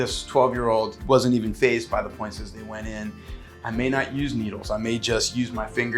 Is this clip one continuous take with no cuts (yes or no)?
no